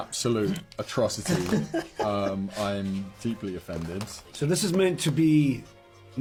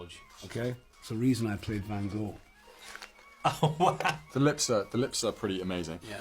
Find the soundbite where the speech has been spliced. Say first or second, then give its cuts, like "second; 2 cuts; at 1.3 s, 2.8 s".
second; 1 cut; at 4.2 s